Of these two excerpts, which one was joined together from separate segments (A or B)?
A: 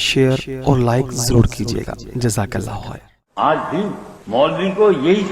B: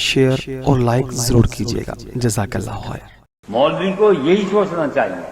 B